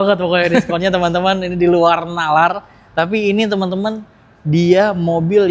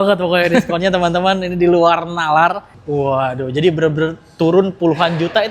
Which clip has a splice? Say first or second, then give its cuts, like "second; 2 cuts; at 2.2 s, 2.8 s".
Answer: second; 1 cut; at 2.8 s